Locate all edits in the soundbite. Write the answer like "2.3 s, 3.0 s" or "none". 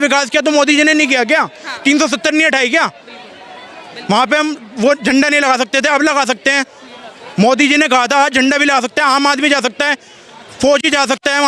none